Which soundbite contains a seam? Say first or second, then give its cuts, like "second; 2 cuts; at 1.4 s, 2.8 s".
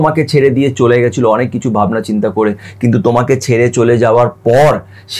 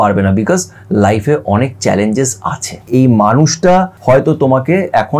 second; 2 cuts; at 2.9 s, 3.9 s